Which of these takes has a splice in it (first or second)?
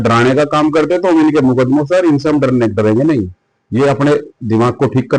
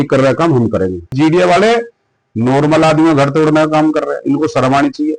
second